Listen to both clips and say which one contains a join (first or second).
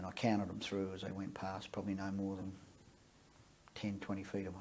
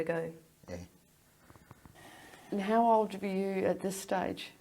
second